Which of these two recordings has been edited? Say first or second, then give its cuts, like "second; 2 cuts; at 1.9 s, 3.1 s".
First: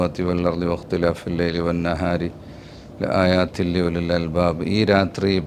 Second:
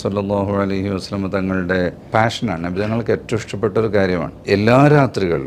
second; 2 cuts; at 2.1 s, 4.3 s